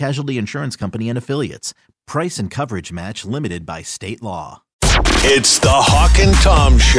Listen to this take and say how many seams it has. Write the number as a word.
one